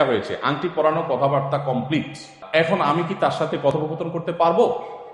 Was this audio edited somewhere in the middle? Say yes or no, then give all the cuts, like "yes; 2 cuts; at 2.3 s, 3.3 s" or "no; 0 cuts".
no; 0 cuts